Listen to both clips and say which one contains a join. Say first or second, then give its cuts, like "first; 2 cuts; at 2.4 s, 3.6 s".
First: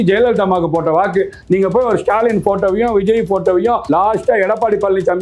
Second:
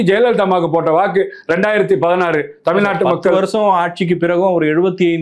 first; 2 cuts; at 1.4 s, 3.8 s